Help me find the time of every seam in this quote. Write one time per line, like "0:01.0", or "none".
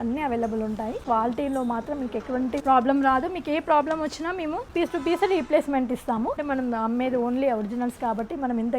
0:01.0
0:02.6
0:04.7
0:06.4